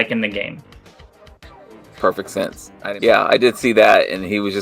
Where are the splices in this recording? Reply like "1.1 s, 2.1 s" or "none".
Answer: 2.7 s